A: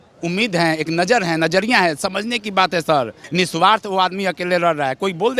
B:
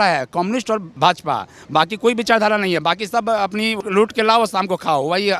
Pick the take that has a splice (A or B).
A